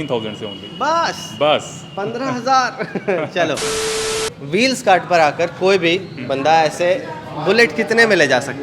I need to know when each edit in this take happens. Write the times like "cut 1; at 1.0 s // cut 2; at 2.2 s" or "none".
cut 1; at 3.9 s